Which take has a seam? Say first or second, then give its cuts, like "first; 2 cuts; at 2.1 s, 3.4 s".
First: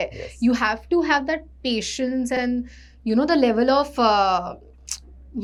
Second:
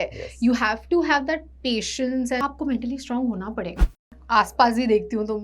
second; 2 cuts; at 2.4 s, 3.9 s